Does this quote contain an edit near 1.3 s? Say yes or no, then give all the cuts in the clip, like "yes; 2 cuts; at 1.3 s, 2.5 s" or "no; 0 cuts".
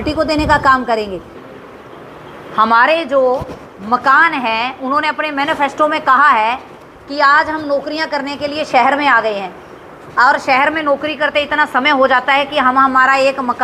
yes; 1 cut; at 1.3 s